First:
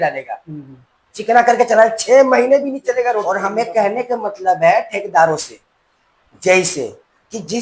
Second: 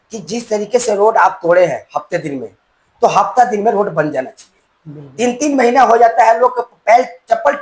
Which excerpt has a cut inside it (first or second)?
first